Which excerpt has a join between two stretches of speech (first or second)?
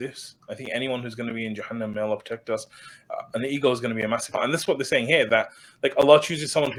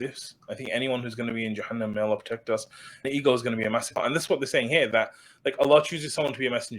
second